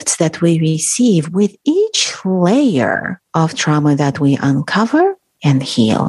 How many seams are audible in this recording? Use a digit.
0